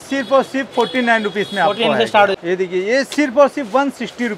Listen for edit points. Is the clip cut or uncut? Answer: cut